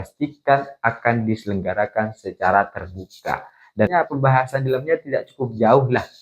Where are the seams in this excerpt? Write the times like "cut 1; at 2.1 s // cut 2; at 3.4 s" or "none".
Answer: cut 1; at 3.9 s